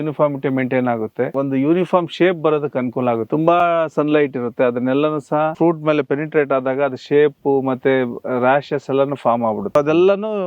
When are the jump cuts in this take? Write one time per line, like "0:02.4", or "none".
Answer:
0:01.3
0:03.2
0:05.5
0:09.7